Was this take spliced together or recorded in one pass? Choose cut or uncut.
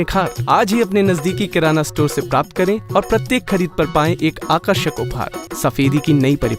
cut